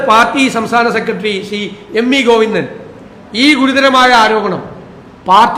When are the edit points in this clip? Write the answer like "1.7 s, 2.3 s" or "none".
none